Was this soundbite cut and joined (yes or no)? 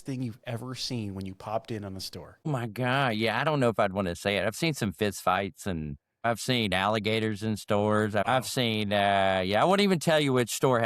yes